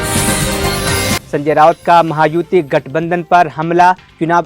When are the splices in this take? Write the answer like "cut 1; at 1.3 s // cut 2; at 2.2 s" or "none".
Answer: cut 1; at 1.0 s